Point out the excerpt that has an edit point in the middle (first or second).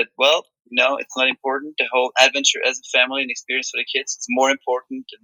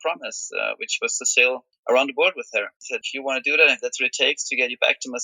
second